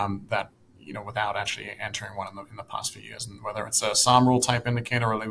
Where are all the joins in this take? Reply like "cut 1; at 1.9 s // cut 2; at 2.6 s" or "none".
none